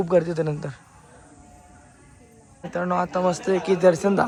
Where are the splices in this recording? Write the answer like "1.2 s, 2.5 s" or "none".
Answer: none

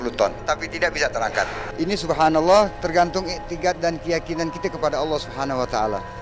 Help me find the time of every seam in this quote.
1.7 s

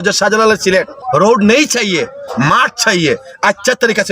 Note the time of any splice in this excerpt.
1.0 s

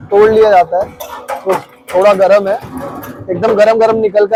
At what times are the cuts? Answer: none

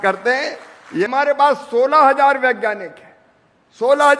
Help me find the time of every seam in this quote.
1.0 s

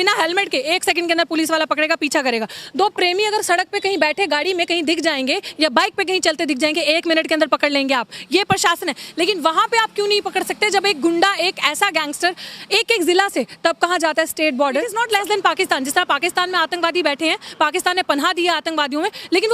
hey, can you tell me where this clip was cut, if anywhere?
14.9 s

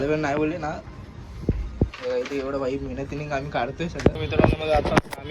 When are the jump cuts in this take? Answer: 4.2 s

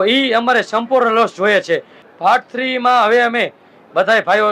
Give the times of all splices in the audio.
2.0 s

